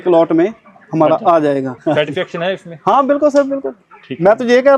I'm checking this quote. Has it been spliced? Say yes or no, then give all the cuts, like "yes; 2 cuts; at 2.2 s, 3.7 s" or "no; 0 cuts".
yes; 1 cut; at 1.7 s